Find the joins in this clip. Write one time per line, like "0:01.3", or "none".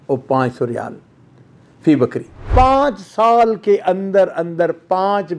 0:02.4